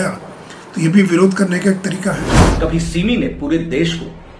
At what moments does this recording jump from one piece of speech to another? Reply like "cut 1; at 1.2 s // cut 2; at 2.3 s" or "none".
cut 1; at 2.4 s